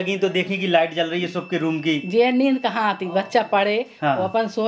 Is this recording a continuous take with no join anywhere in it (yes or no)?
yes